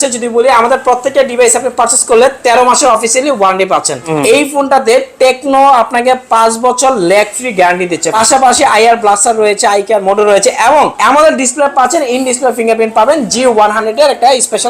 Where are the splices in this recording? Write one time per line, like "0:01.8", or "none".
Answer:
0:04.0
0:08.1
0:11.0